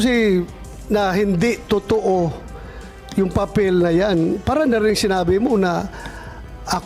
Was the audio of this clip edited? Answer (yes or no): no